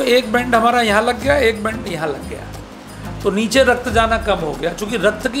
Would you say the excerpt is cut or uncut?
uncut